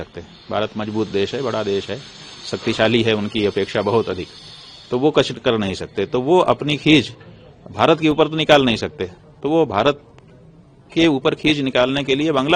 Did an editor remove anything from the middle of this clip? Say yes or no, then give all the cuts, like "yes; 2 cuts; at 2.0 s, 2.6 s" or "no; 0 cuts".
no; 0 cuts